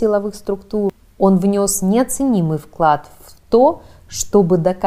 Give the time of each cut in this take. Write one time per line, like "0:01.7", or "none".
0:00.9